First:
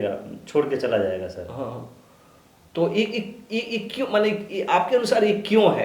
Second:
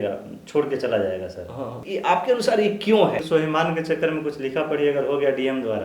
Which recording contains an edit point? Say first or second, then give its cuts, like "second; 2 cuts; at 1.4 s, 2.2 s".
second; 2 cuts; at 1.8 s, 3.2 s